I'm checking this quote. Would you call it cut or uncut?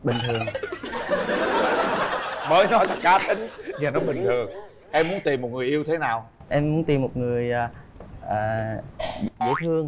uncut